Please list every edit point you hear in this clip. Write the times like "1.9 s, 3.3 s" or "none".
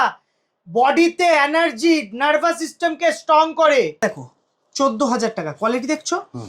4.0 s